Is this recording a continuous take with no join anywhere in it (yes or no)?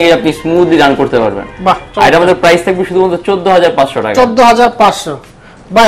yes